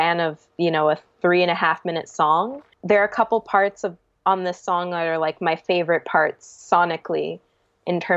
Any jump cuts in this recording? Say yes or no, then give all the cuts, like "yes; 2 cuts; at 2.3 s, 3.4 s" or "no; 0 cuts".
yes; 1 cut; at 2.6 s